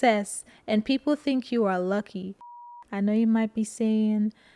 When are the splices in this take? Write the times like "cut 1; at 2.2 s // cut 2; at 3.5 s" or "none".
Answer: cut 1; at 2.6 s